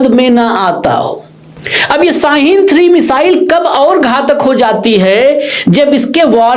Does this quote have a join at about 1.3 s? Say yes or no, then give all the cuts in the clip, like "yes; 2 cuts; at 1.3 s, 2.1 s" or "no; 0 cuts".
no; 0 cuts